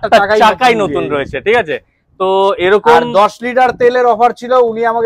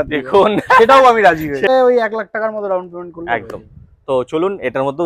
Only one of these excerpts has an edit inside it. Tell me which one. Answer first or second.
second